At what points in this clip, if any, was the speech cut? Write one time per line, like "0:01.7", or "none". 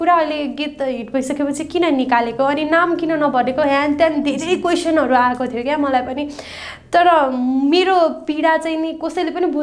none